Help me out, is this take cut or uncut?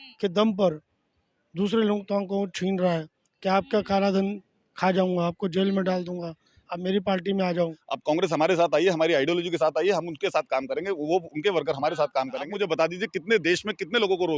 cut